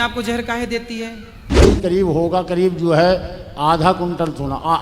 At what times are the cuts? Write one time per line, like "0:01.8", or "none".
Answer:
0:01.6